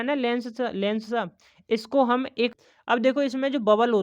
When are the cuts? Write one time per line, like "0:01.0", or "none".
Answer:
0:02.5